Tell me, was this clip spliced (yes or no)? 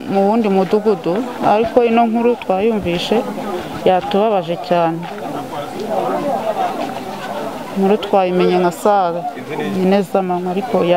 no